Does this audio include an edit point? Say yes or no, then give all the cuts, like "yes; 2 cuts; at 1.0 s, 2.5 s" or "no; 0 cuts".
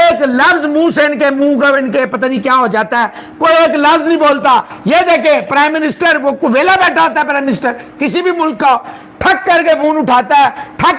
no; 0 cuts